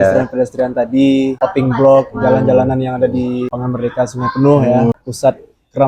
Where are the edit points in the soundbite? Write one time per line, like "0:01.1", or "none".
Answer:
0:01.3
0:03.5
0:04.9